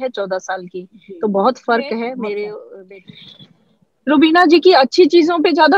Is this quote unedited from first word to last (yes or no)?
no